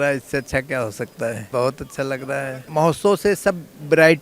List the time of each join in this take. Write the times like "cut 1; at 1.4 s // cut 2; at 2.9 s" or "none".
cut 1; at 1.4 s // cut 2; at 2.6 s

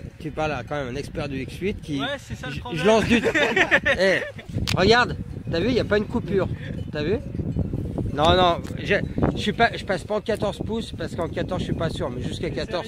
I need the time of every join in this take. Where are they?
cut 1; at 10.9 s

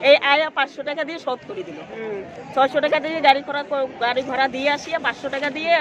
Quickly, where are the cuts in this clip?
cut 1; at 1.8 s

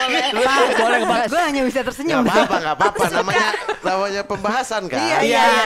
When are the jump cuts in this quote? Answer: cut 1; at 1.3 s

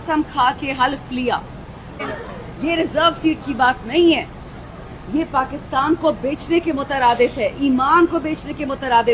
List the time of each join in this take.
cut 1; at 2.1 s

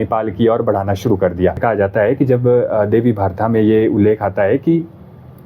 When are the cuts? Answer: cut 1; at 1.6 s

